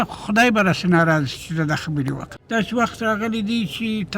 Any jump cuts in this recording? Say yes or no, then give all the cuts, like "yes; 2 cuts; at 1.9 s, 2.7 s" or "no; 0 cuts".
yes; 1 cut; at 2.3 s